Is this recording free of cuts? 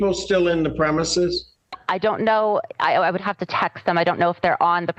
yes; 0 cuts

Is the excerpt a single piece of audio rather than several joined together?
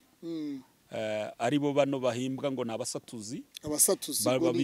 yes; 0 cuts

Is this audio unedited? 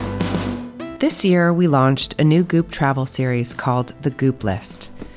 no; 1 cut; at 0.9 s

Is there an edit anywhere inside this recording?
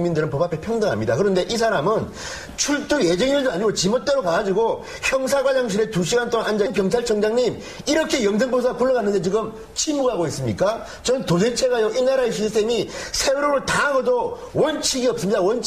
no; 0 cuts

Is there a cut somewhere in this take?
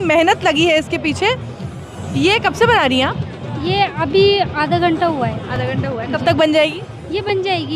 no; 0 cuts

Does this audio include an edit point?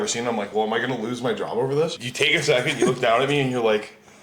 yes; 1 cut; at 1.9 s

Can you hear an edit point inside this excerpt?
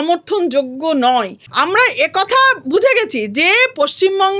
yes; 1 cut; at 1.4 s

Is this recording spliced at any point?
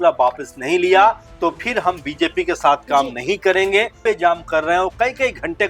yes; 1 cut; at 4.0 s

